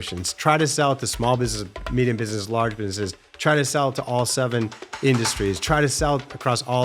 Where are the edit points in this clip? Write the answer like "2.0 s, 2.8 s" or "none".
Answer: none